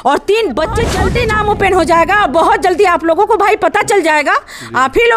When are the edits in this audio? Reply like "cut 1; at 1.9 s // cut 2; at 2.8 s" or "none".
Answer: cut 1; at 1.0 s

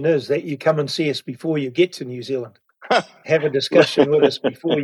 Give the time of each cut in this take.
none

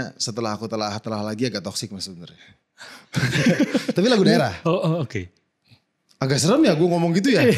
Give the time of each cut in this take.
none

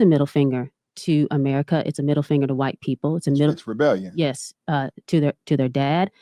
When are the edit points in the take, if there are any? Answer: none

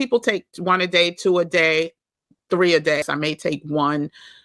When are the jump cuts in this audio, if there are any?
cut 1; at 3.0 s

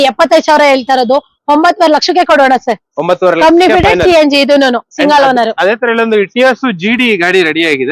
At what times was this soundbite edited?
none

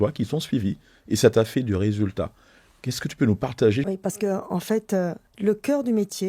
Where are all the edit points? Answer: cut 1; at 3.8 s // cut 2; at 5.2 s

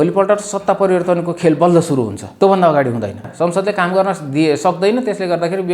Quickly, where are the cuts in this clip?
cut 1; at 2.2 s // cut 2; at 3.3 s

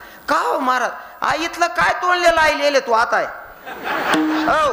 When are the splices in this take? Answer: none

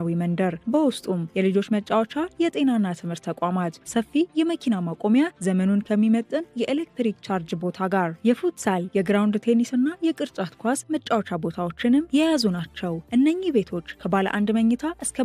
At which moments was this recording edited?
none

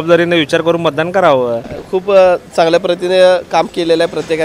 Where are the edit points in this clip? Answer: cut 1; at 1.7 s

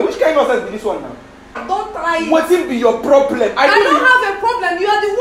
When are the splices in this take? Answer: cut 1; at 1.6 s

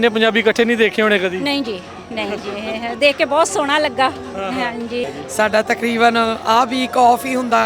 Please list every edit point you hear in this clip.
cut 1; at 5.0 s

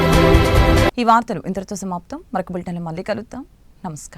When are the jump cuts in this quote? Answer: none

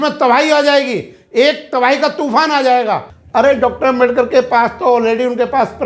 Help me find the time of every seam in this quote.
cut 1; at 3.1 s

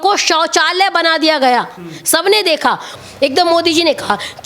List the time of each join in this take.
cut 1; at 3.0 s

